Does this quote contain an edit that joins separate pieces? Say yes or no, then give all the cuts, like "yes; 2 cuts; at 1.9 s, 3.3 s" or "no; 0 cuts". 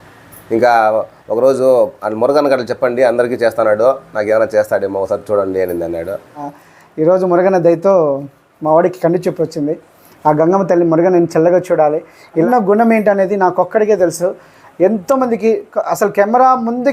yes; 2 cuts; at 6.5 s, 12.5 s